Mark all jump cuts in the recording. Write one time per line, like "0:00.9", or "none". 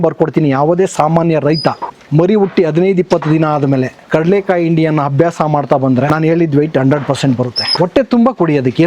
0:01.9
0:04.0
0:06.1
0:07.6